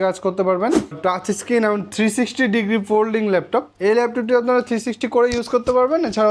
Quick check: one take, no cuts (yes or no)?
no